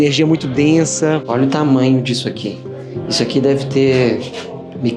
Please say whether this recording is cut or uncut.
cut